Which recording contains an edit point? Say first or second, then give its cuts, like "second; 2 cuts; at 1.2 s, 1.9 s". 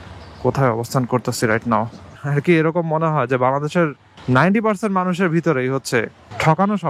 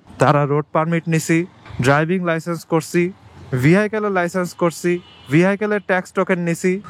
first; 1 cut; at 2.1 s